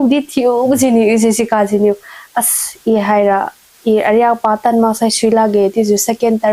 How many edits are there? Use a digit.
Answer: 0